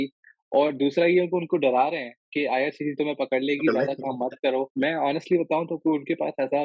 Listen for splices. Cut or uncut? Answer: cut